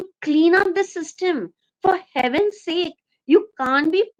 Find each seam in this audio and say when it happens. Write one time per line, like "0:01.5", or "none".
none